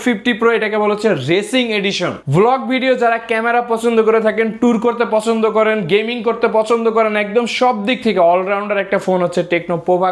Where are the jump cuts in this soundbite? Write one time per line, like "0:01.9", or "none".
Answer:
0:02.2